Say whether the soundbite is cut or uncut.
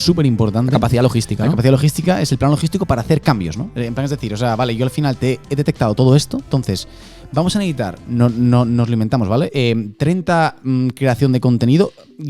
uncut